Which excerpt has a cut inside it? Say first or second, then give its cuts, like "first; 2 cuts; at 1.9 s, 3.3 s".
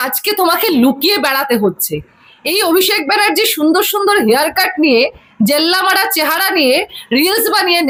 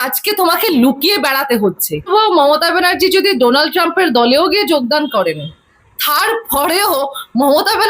second; 1 cut; at 2.1 s